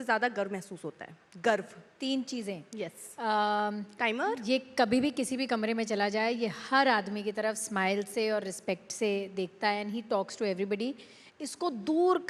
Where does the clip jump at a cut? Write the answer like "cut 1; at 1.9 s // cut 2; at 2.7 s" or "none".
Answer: none